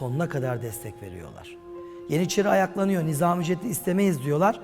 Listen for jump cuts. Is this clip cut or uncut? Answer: uncut